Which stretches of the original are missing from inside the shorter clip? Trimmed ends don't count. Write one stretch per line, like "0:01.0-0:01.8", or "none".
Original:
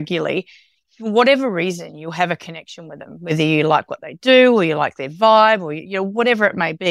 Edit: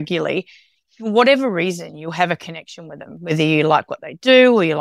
none